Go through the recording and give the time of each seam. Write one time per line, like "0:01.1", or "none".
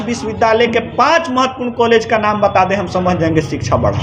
none